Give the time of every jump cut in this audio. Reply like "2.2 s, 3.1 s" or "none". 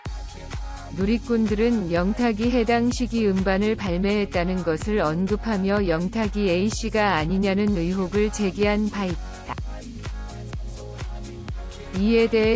0.9 s, 9.2 s, 11.4 s